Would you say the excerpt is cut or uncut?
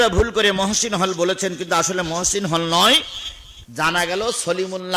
uncut